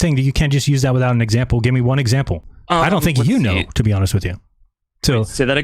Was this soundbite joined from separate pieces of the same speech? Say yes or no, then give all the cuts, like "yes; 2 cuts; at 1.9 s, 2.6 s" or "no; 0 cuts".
no; 0 cuts